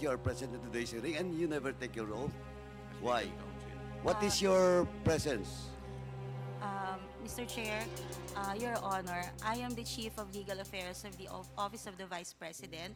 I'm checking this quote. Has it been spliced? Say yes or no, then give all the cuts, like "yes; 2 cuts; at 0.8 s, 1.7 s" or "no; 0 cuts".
no; 0 cuts